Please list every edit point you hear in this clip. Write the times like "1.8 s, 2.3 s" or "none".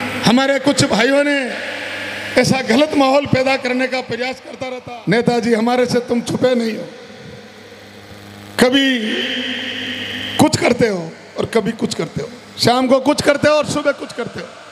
4.5 s

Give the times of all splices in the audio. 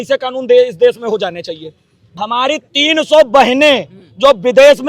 2.0 s

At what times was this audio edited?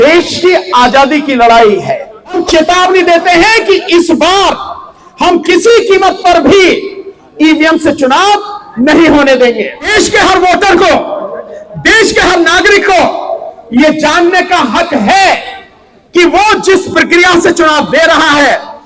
2.4 s, 9.9 s

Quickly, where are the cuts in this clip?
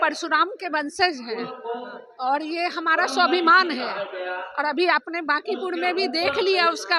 none

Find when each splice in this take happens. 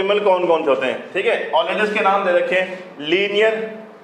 none

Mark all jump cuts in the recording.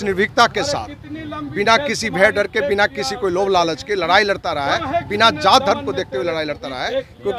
none

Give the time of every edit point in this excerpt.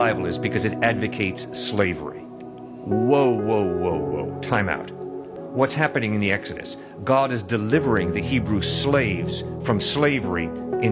5.4 s

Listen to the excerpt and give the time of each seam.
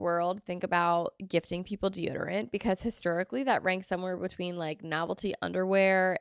none

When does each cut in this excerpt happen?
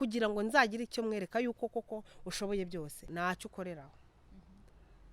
3.0 s

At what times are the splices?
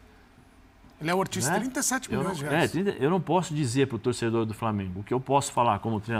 none

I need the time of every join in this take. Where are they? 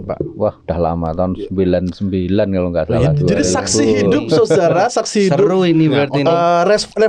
none

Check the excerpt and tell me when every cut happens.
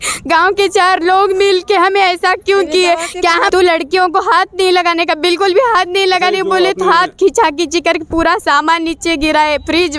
3.5 s

